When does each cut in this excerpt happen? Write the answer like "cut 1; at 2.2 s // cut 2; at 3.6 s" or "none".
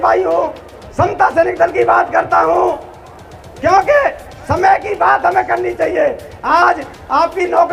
none